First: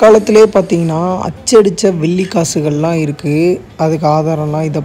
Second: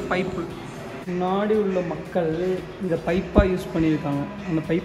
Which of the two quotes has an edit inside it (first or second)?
second